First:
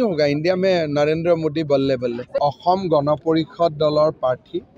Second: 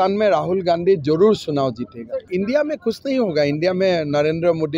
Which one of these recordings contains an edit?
second; 1 cut; at 2.2 s

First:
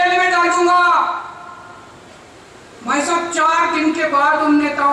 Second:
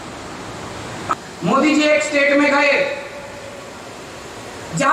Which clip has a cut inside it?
second; 1 cut; at 1.1 s

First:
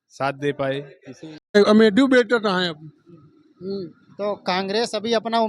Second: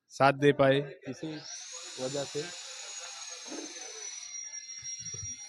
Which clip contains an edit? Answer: first; 1 cut; at 1.5 s

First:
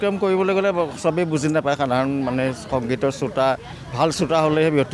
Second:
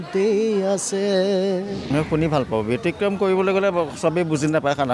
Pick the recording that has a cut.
second; 1 cut; at 1.9 s

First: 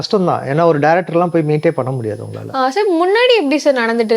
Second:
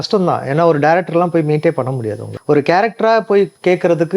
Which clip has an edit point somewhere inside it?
second; 1 cut; at 2.3 s

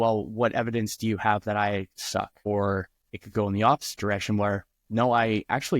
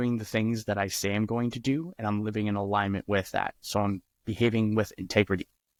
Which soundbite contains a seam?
first; 1 cut; at 2.5 s

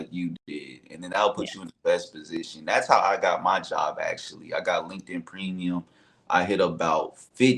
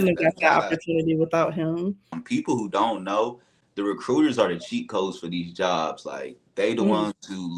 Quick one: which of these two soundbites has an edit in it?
second; 1 cut; at 2.1 s

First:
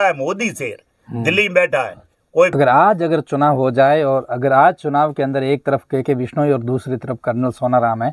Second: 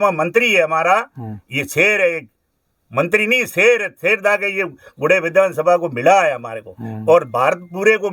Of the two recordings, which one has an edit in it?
first; 1 cut; at 2.5 s

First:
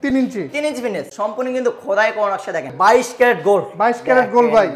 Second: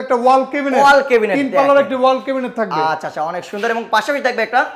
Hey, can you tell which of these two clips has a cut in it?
first; 2 cuts; at 1.1 s, 2.7 s

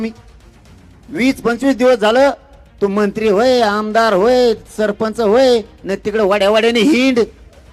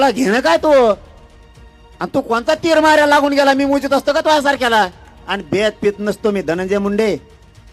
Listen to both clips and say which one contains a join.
second; 1 cut; at 5.2 s

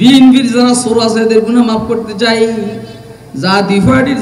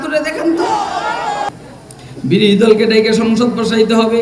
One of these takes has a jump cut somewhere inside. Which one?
second; 1 cut; at 1.5 s

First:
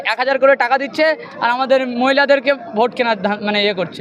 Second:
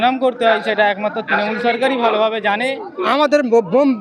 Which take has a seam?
second; 1 cut; at 3.0 s

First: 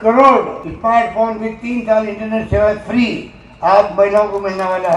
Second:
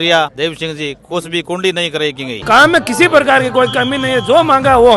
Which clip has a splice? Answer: second; 1 cut; at 2.4 s

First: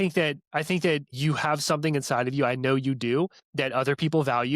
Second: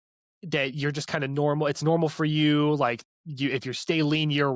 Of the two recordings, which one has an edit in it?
first; 2 cuts; at 1.1 s, 3.4 s

